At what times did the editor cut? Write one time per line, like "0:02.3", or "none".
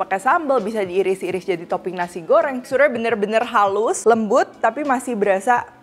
0:02.6
0:04.0